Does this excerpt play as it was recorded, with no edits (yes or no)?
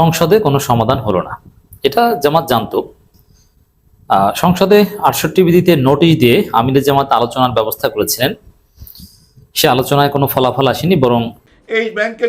no